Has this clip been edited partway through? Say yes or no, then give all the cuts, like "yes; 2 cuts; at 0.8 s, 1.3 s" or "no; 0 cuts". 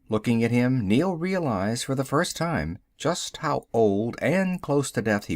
yes; 1 cut; at 2.8 s